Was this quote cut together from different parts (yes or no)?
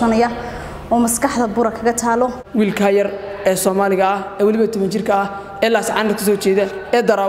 yes